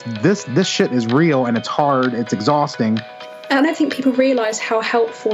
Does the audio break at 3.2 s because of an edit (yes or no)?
yes